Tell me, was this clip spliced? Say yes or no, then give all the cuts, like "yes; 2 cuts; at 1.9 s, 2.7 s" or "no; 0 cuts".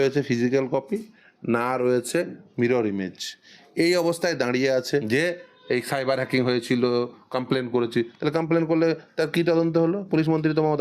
yes; 1 cut; at 5.0 s